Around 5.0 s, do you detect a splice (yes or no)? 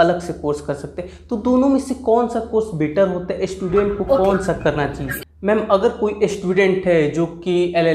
yes